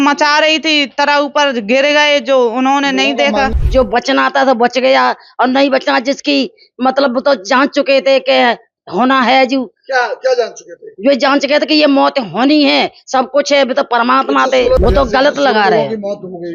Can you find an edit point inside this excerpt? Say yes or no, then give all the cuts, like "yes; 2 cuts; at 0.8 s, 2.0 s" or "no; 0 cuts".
yes; 2 cuts; at 3.5 s, 14.8 s